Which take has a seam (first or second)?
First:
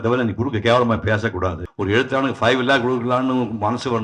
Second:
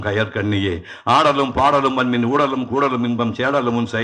first